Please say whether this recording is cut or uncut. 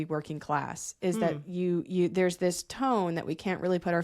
cut